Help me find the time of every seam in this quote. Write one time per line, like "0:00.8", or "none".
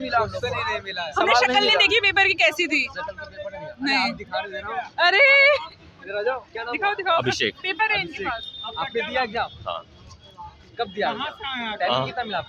none